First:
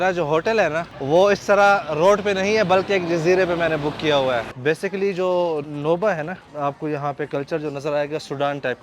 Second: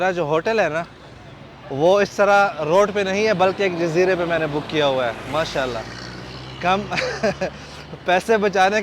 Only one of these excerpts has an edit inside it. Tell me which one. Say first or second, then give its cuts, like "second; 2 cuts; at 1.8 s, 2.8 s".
first; 4 cuts; at 0.9 s, 4.5 s, 5.7 s, 6.5 s